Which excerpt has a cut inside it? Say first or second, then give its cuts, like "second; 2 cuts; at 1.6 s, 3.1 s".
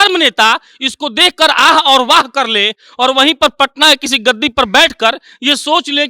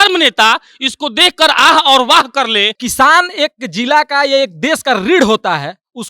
second; 1 cut; at 2.8 s